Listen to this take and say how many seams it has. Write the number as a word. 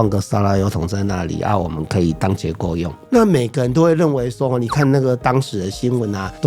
one